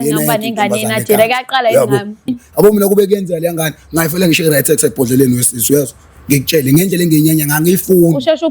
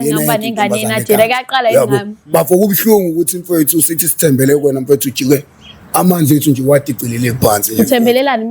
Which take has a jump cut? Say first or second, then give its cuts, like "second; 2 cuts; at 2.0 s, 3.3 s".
first; 1 cut; at 2.3 s